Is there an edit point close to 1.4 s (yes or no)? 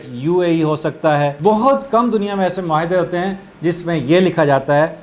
yes